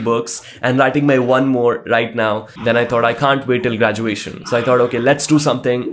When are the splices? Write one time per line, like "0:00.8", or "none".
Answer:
0:02.5
0:04.3